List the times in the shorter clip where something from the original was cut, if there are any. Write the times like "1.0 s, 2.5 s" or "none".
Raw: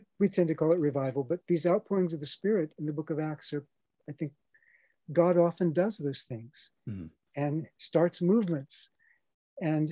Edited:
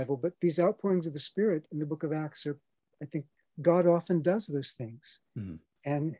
3.4 s